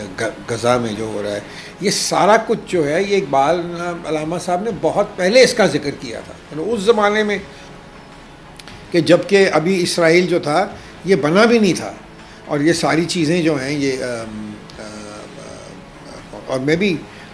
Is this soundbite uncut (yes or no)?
yes